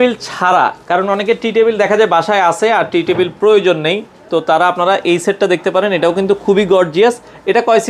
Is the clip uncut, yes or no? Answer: yes